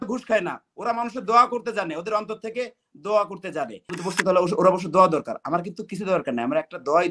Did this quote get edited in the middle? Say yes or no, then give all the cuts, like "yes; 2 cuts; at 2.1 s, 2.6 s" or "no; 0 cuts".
yes; 1 cut; at 3.9 s